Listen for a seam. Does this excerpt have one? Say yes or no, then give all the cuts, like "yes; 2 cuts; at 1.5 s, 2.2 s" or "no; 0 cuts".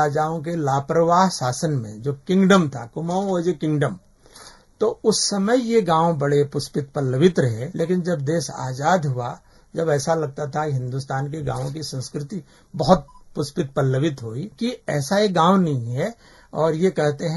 yes; 2 cuts; at 7.6 s, 14.5 s